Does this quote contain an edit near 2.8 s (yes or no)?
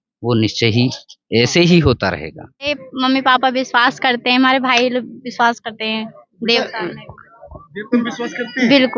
yes